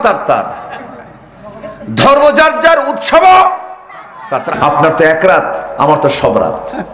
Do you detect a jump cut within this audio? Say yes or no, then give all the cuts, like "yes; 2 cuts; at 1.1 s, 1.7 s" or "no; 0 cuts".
yes; 1 cut; at 4.5 s